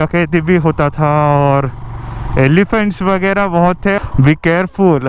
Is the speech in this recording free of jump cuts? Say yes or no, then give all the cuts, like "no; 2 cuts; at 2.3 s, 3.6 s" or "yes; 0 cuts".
no; 1 cut; at 4.0 s